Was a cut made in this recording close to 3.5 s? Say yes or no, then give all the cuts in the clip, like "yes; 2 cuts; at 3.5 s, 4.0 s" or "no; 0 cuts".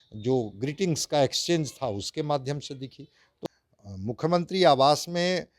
yes; 1 cut; at 3.5 s